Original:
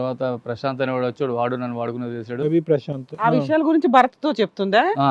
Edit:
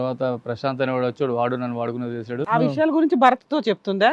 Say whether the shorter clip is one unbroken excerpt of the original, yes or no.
no